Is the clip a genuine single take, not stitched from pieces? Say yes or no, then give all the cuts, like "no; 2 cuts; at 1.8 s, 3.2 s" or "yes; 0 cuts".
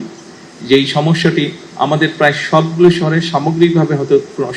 yes; 0 cuts